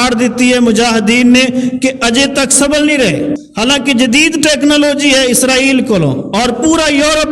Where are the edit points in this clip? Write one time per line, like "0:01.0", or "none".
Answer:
0:03.4